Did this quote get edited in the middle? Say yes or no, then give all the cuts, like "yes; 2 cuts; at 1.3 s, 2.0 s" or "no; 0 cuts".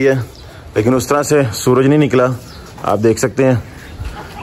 no; 0 cuts